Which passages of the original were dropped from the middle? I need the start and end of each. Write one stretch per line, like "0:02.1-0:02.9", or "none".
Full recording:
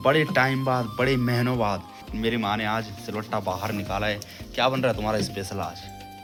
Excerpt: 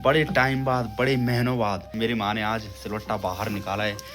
0:01.9-0:02.1